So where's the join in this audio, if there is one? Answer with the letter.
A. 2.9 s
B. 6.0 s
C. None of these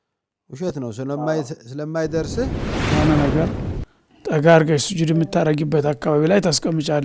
A